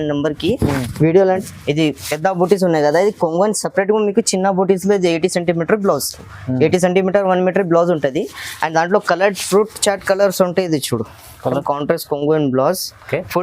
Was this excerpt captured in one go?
no; 2 cuts; at 1.4 s, 11.6 s

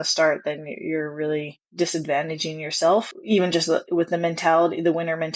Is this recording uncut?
no; 1 cut; at 3.2 s

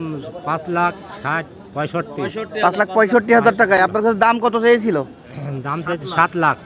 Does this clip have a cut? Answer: no; 0 cuts

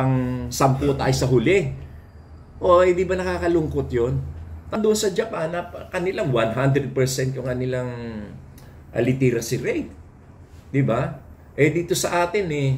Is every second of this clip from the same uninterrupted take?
no; 1 cut; at 4.7 s

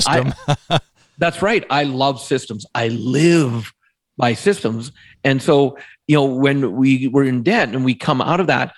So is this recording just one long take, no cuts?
yes; 0 cuts

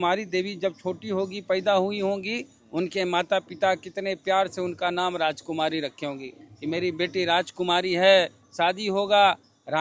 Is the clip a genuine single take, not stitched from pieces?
yes; 0 cuts

